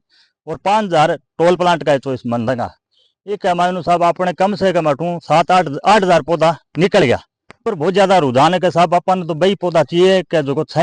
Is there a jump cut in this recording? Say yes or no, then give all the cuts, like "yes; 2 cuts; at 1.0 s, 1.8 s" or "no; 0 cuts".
yes; 1 cut; at 7.7 s